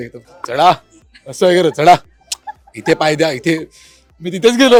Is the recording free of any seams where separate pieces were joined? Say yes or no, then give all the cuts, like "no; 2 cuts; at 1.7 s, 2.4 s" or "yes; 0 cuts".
yes; 0 cuts